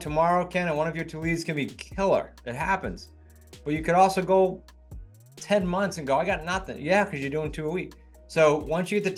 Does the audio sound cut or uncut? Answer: uncut